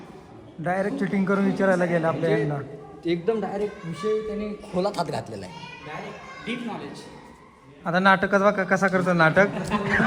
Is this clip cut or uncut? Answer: uncut